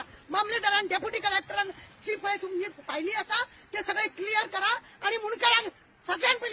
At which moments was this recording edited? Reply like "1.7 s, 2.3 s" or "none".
none